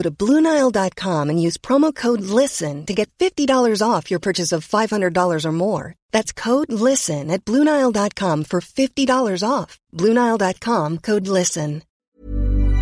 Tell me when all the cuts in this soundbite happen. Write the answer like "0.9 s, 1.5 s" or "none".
11.9 s